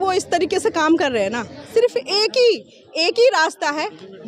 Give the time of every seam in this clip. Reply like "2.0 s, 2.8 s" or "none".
1.7 s